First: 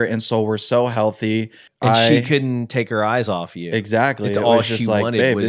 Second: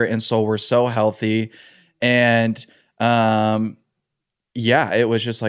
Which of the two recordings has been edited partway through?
first; 1 cut; at 1.7 s

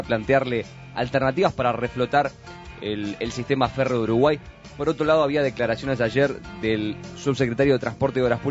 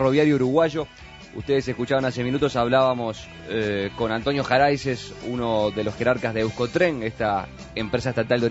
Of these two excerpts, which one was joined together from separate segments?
second; 1 cut; at 2.5 s

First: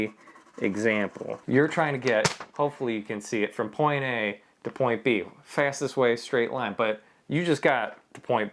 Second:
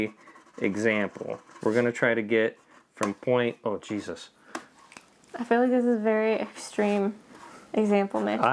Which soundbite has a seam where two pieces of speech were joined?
first; 1 cut; at 1.4 s

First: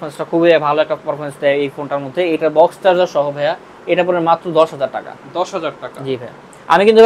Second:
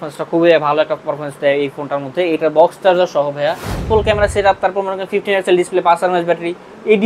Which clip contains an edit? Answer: second; 1 cut; at 3.8 s

